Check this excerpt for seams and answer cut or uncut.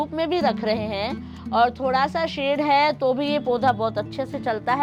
uncut